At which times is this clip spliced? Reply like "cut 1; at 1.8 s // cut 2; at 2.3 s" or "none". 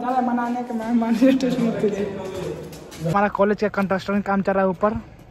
cut 1; at 3.1 s